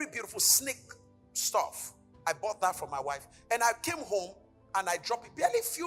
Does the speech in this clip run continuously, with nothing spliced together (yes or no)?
yes